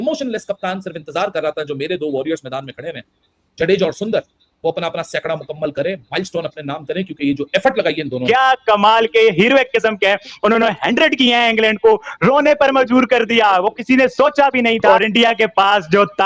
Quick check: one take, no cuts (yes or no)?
no